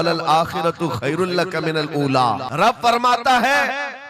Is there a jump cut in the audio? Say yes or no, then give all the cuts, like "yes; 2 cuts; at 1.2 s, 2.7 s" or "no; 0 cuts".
yes; 1 cut; at 2.5 s